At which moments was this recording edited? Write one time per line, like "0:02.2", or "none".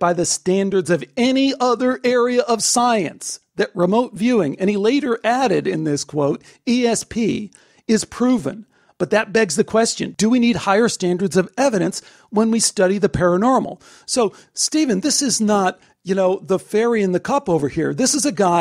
none